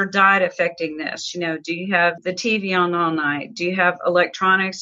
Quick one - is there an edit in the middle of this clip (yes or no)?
yes